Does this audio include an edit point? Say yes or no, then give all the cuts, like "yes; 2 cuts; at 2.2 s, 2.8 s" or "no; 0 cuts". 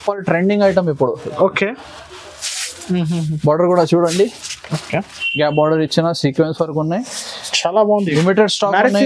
no; 0 cuts